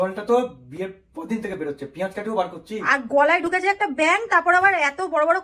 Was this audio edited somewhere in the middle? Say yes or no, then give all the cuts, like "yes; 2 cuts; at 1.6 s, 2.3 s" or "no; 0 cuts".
no; 0 cuts